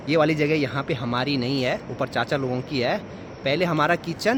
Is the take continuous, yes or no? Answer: yes